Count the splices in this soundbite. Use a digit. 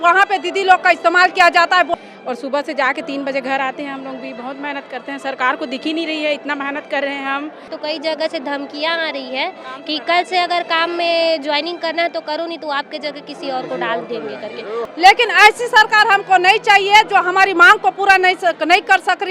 3